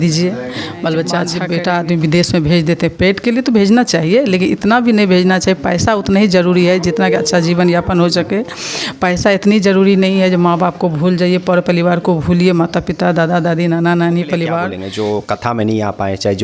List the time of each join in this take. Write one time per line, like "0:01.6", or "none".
0:01.4
0:14.7